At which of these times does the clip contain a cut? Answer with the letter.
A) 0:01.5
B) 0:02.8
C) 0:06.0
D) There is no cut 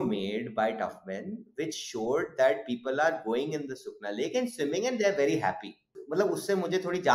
C